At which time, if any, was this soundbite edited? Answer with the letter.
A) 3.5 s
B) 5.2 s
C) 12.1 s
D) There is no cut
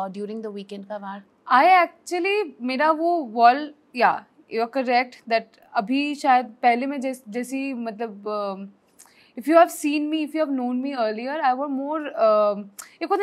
D